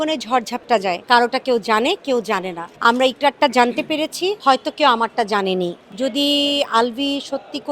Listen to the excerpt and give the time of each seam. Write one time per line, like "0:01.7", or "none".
0:01.0
0:02.6
0:04.4
0:05.8